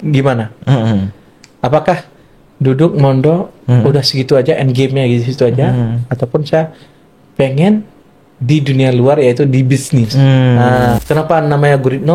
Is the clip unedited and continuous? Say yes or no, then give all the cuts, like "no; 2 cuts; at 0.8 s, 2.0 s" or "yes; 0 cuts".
no; 1 cut; at 11.0 s